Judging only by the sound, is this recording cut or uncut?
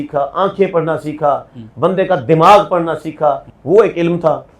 cut